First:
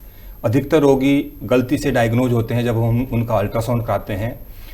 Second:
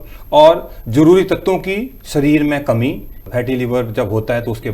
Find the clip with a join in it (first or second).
second